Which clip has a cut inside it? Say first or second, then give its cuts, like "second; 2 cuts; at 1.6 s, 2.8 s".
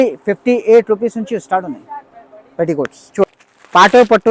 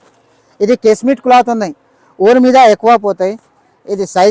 first; 1 cut; at 3.3 s